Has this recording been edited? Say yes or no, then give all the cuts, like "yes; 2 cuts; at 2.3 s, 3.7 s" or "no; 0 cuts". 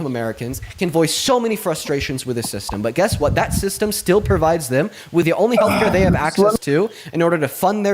yes; 1 cut; at 5.2 s